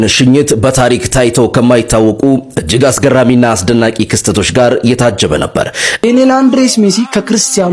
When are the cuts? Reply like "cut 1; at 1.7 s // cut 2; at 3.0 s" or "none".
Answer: cut 1; at 6.0 s